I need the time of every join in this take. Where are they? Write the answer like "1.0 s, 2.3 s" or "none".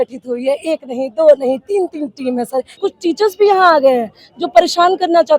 2.8 s